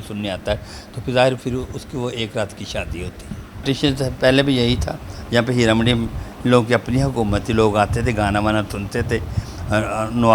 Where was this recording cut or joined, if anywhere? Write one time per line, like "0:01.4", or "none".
0:03.6